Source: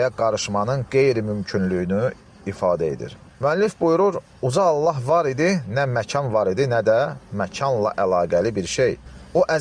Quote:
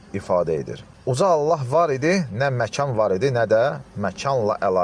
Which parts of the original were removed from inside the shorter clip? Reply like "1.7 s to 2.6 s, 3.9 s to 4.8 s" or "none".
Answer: 3.3 s to 4.3 s